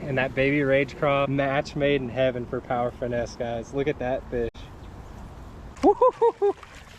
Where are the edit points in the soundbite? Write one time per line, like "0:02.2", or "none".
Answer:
0:05.6